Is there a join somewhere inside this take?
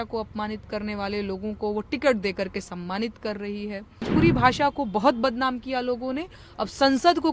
yes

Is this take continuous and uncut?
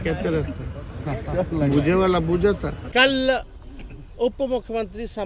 no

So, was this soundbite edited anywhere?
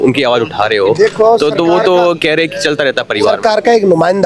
no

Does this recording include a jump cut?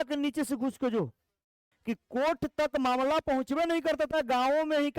yes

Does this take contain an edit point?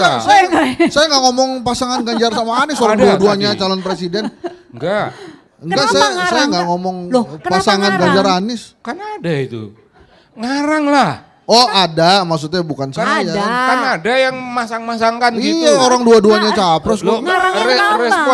no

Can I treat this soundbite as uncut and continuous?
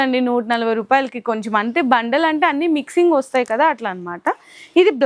yes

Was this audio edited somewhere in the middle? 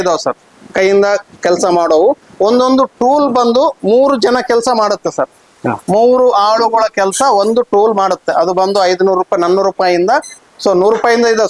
no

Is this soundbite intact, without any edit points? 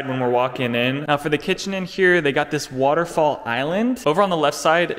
no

